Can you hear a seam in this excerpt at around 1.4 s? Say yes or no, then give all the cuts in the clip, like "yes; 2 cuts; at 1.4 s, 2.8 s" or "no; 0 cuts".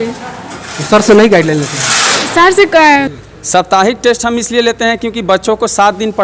no; 1 cut; at 3.1 s